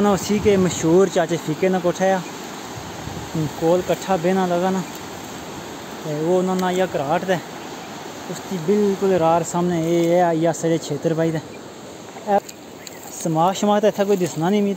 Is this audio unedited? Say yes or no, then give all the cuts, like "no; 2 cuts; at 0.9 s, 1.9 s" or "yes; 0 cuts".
no; 1 cut; at 12.4 s